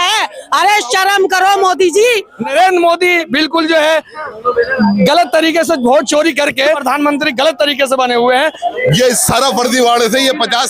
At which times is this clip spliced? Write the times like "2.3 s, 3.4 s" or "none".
2.5 s, 6.8 s, 8.6 s